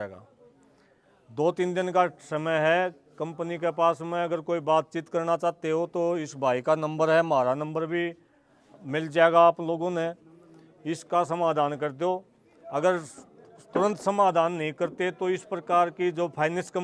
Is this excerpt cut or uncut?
uncut